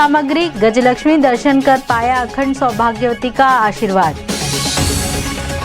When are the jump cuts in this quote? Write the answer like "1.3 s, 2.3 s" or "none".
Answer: none